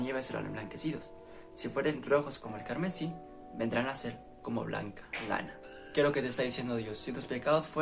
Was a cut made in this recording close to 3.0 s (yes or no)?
no